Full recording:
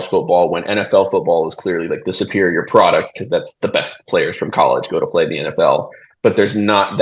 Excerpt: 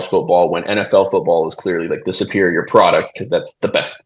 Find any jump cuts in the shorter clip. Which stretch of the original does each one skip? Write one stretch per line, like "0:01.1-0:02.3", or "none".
none